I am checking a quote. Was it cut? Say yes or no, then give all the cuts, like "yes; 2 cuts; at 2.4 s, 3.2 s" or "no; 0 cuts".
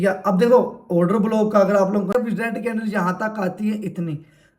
yes; 1 cut; at 2.1 s